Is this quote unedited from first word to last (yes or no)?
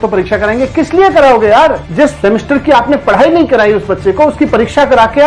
no